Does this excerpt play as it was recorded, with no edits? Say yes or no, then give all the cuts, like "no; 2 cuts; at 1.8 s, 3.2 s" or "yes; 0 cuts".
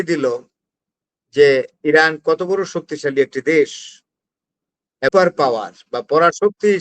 no; 1 cut; at 5.1 s